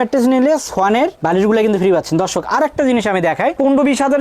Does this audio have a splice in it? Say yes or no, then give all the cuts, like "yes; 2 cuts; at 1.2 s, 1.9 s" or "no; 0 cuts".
no; 0 cuts